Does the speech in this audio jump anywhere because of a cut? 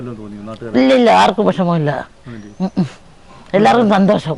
no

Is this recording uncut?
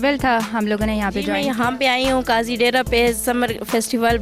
no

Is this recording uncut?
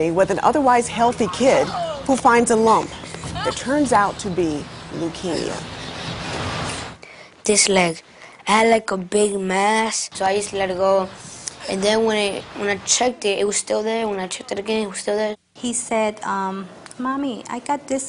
yes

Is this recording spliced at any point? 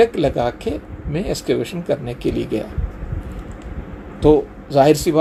no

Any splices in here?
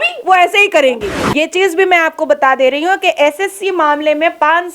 yes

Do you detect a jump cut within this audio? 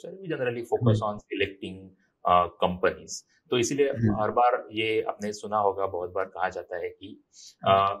no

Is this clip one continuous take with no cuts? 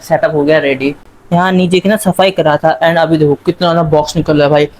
no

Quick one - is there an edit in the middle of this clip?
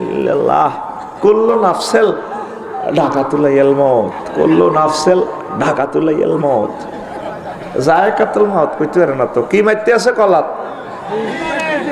no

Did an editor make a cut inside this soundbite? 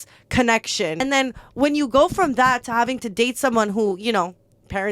yes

